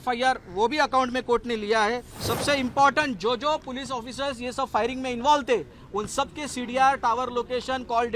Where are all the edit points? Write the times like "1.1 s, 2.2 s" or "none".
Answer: 2.1 s